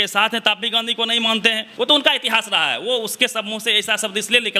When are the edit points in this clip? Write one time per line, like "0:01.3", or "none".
0:01.7